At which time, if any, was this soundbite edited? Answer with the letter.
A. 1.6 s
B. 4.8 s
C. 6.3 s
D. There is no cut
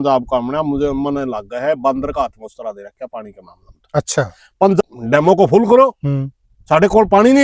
B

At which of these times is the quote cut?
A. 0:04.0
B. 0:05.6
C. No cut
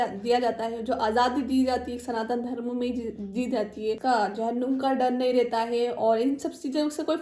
A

